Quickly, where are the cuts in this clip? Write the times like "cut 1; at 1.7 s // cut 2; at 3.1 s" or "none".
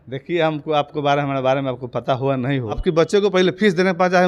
cut 1; at 2.8 s